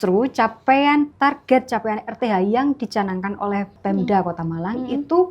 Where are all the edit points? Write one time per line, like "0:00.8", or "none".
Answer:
0:01.1
0:03.8